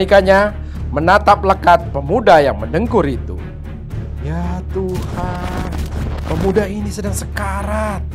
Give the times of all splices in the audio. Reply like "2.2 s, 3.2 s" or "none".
none